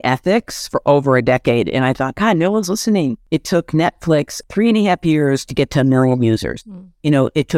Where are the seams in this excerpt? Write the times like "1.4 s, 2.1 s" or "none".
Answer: 3.2 s, 4.4 s